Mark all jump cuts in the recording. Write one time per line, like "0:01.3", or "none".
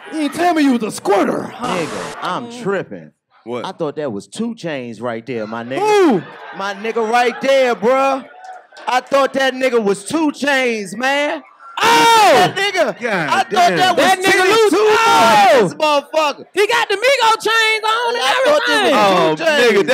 0:01.7